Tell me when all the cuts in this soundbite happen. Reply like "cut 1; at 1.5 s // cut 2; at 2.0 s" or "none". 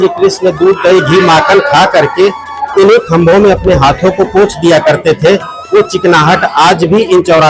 none